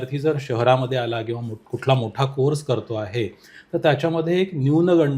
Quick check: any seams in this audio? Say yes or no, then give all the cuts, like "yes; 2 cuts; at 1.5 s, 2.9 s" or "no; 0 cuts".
no; 0 cuts